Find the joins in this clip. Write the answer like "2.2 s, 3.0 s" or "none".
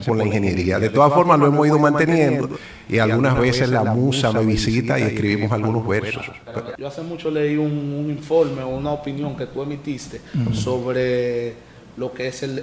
6.6 s